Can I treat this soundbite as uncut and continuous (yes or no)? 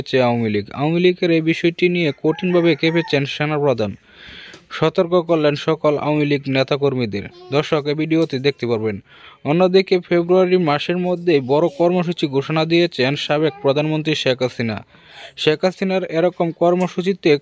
yes